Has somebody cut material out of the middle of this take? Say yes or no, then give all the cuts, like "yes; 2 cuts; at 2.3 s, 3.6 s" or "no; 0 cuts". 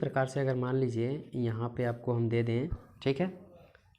yes; 1 cut; at 2.8 s